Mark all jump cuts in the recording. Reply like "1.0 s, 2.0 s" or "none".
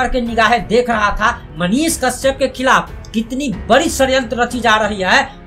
1.5 s